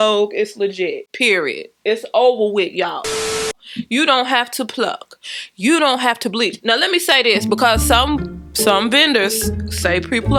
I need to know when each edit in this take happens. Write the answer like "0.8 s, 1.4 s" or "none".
none